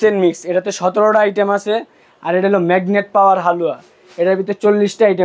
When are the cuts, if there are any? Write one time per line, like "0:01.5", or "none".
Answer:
none

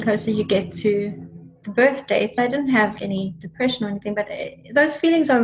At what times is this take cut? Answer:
0:02.3
0:03.0

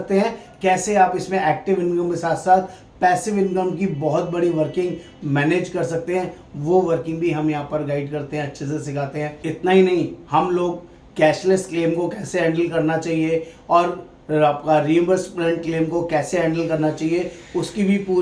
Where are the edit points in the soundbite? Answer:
0:09.3

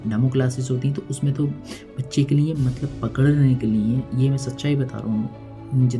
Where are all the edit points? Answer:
none

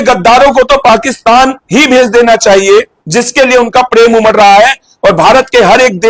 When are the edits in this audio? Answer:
0:01.6
0:03.0

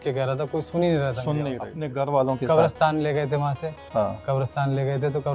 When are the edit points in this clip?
0:01.8

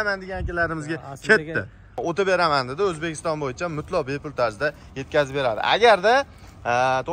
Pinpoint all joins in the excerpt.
0:02.0

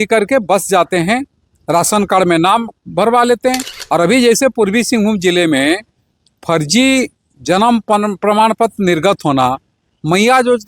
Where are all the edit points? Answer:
0:03.7

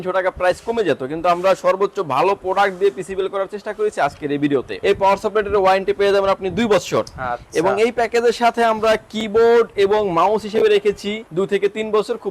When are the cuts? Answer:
0:04.7
0:11.2

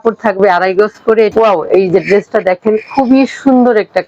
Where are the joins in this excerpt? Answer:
0:01.3

